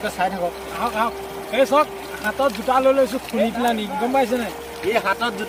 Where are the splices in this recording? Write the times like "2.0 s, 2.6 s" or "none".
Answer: none